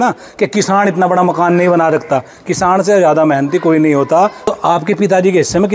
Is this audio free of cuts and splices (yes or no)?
no